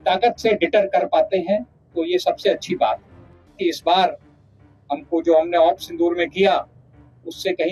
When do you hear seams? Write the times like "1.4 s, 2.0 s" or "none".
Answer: 3.6 s